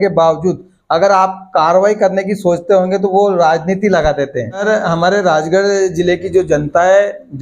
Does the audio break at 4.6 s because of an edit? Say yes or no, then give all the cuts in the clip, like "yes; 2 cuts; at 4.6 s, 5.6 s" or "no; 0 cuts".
yes; 1 cut; at 4.6 s